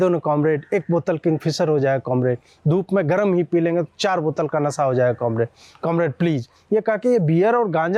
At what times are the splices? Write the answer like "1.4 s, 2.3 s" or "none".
none